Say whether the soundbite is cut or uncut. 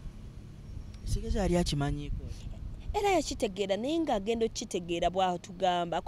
uncut